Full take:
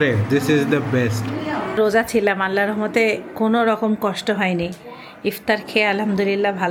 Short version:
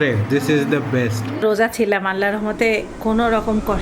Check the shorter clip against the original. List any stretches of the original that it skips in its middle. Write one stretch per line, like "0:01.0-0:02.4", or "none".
0:01.3-0:01.7